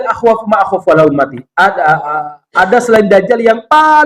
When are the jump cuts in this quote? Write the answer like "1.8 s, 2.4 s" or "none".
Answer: none